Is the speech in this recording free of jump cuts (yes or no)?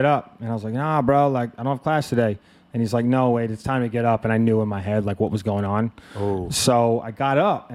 yes